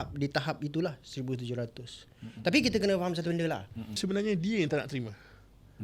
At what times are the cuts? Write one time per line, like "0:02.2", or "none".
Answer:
0:04.0